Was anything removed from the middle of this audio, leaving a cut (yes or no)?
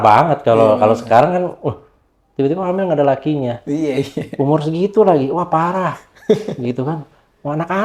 no